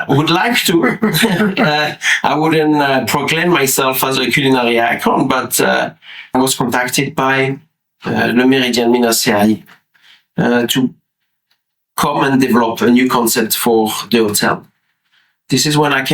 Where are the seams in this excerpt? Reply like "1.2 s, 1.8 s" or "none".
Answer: 6.3 s